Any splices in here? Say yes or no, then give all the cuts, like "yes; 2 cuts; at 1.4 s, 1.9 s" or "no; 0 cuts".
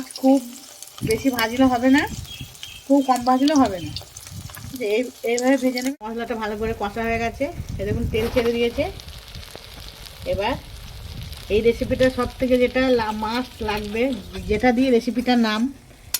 yes; 1 cut; at 5.8 s